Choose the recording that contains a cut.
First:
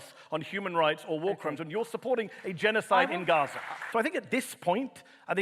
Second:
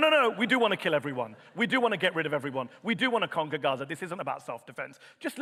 first; 1 cut; at 3.8 s

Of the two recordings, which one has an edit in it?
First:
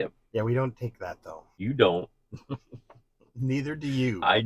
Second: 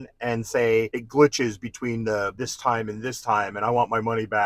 second; 2 cuts; at 1.0 s, 2.4 s

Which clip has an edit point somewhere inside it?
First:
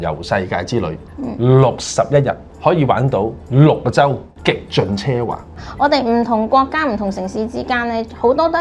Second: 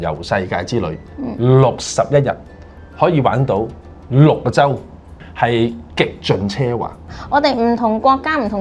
first; 3 cuts; at 2.5 s, 3.4 s, 4.3 s

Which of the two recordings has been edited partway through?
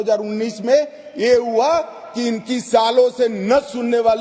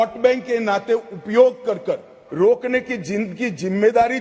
second; 1 cut; at 2.2 s

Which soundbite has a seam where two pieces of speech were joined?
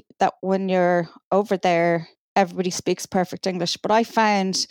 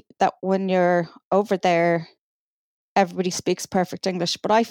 first; 1 cut; at 2.2 s

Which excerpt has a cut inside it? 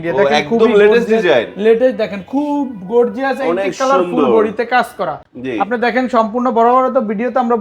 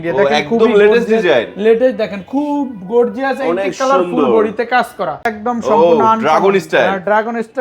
second; 1 cut; at 5.3 s

